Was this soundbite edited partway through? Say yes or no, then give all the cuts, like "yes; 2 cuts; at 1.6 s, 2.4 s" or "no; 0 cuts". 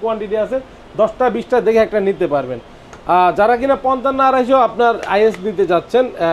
no; 0 cuts